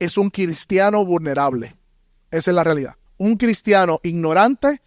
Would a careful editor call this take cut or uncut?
cut